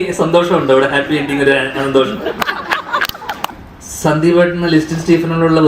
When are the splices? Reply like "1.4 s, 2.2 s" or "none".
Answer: 3.5 s